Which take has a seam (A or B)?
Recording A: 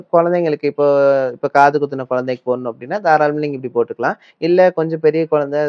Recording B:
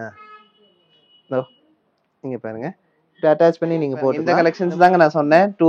B